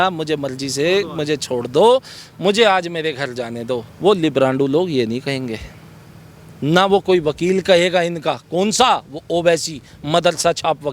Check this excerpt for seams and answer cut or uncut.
uncut